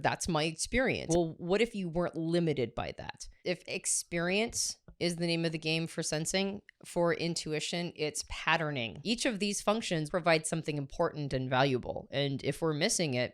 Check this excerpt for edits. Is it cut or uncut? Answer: cut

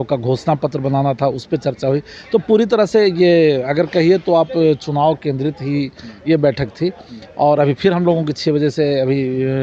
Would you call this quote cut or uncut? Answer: uncut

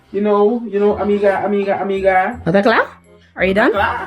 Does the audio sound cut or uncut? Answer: cut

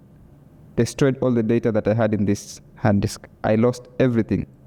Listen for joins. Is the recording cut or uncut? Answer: uncut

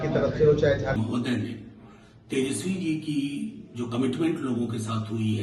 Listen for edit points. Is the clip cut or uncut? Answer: cut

